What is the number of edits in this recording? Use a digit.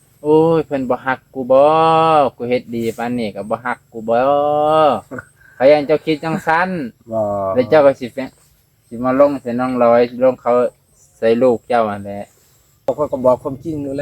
1